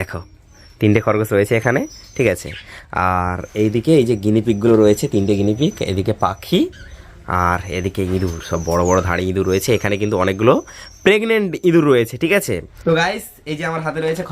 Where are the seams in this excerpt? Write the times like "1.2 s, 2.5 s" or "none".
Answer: 12.8 s